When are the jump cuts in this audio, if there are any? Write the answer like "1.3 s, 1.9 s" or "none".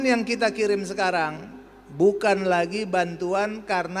none